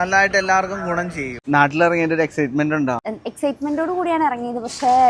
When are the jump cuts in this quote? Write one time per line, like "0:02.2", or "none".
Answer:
0:01.4
0:03.1